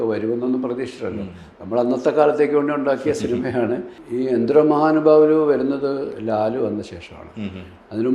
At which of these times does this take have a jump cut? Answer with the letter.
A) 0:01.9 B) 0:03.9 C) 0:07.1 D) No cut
B